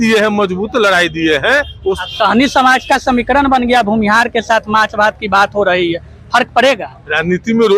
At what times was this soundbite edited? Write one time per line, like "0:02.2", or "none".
0:02.0